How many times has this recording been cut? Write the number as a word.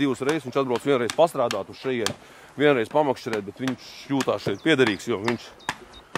zero